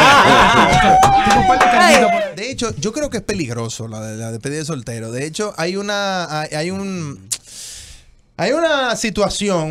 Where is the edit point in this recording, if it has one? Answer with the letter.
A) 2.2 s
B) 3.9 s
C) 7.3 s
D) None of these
A